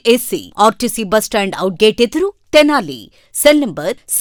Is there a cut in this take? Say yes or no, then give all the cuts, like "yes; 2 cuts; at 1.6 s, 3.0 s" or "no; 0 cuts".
no; 0 cuts